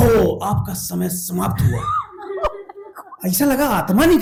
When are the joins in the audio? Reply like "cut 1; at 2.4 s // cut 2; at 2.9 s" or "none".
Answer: none